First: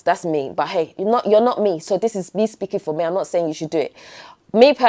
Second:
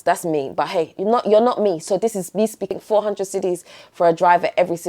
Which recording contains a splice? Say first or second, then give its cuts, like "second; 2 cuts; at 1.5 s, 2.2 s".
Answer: second; 1 cut; at 2.7 s